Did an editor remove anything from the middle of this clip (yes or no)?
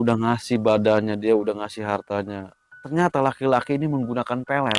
no